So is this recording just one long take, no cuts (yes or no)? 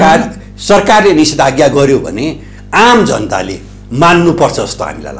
yes